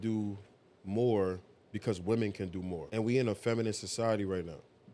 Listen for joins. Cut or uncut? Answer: cut